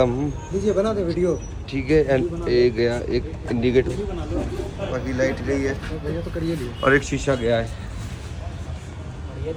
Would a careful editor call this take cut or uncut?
uncut